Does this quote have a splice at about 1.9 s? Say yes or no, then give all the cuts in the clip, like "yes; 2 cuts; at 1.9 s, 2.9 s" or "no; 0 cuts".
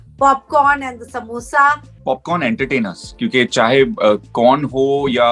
yes; 1 cut; at 1.9 s